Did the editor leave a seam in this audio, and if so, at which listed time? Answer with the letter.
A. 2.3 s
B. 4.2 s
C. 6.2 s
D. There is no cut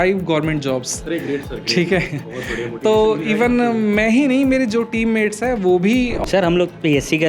C